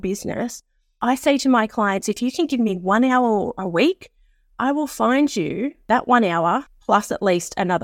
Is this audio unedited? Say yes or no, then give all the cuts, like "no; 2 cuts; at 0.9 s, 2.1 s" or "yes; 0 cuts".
no; 2 cuts; at 5.7 s, 6.7 s